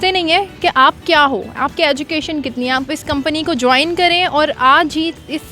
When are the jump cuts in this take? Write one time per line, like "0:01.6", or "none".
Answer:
0:02.9

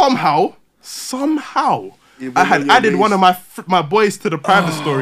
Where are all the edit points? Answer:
none

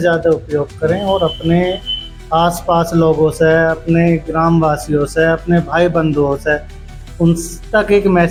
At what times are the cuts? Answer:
none

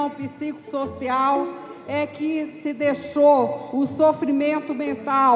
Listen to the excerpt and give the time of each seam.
none

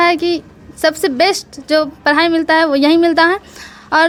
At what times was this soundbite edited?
none

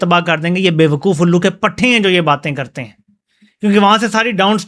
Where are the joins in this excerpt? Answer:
none

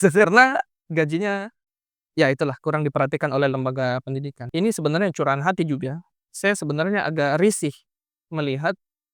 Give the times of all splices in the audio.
0:04.5

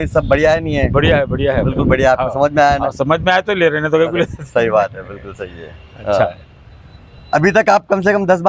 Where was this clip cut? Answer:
none

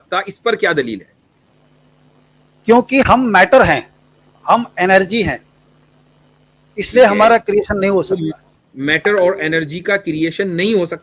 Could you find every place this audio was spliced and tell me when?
none

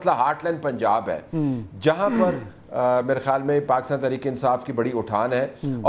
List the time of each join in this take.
none

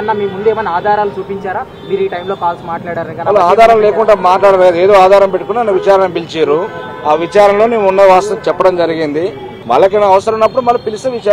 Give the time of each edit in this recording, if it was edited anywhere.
0:09.5

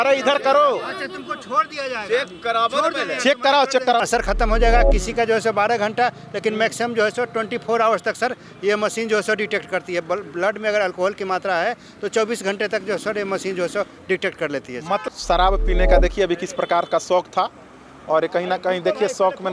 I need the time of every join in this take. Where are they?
0:04.0
0:15.0

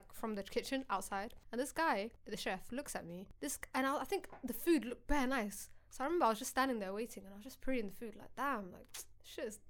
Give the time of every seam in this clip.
0:01.4
0:02.2
0:03.3

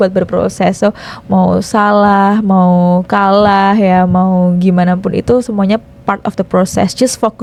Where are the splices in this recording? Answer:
none

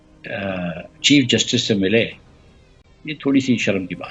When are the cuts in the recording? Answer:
none

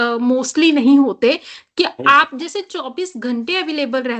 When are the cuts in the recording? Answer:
none

